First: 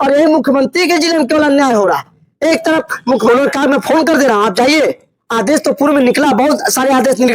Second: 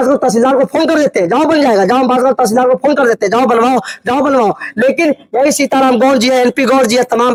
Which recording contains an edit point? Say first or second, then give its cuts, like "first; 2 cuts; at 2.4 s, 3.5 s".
first; 1 cut; at 3.3 s